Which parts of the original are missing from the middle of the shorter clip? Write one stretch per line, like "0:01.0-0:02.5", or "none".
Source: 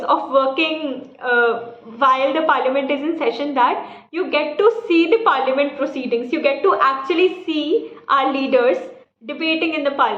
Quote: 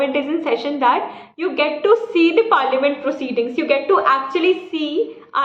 none